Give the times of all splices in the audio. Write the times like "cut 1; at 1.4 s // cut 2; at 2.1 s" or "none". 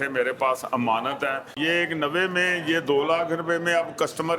cut 1; at 1.5 s